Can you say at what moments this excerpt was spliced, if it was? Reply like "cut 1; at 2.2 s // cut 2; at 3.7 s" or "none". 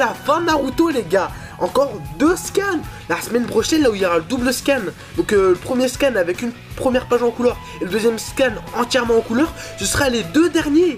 cut 1; at 9.5 s